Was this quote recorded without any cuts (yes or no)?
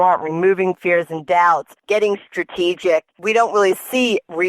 no